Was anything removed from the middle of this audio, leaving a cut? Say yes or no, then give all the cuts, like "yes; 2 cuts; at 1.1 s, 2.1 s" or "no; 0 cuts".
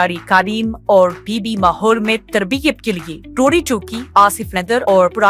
no; 0 cuts